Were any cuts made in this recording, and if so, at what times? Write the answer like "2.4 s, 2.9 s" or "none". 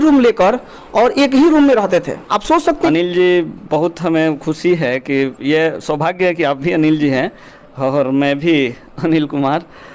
2.9 s